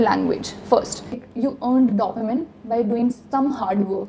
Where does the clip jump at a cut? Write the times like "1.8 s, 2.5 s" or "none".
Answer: 1.2 s